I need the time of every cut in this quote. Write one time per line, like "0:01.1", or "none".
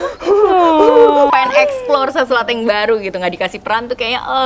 0:01.3